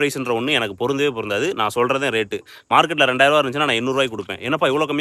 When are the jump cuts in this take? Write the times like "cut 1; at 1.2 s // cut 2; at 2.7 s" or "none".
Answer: none